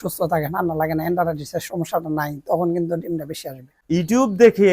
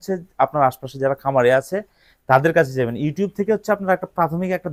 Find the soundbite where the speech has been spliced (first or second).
first